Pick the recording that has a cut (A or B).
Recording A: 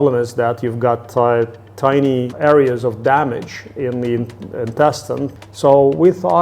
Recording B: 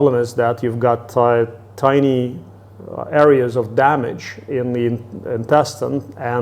A